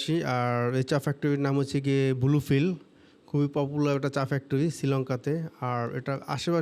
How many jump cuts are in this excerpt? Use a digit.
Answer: 0